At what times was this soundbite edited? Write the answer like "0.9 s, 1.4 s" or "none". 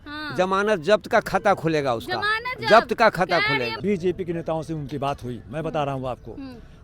3.8 s